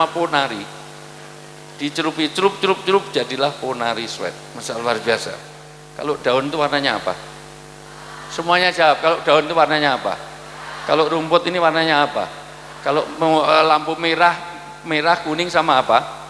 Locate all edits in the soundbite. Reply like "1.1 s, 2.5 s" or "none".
6.2 s